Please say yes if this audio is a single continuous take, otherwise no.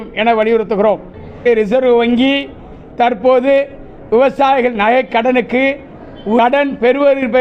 no